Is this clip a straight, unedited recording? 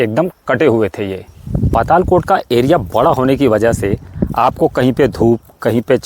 no; 1 cut; at 1.3 s

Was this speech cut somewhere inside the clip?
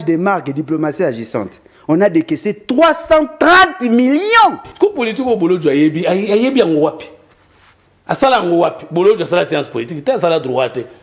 yes; 1 cut; at 4.6 s

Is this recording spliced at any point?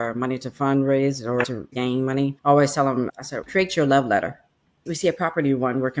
yes; 2 cuts; at 1.6 s, 4.8 s

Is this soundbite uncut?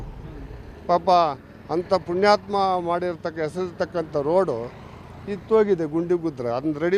yes; 0 cuts

